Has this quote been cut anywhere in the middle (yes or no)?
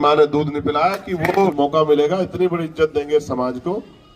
yes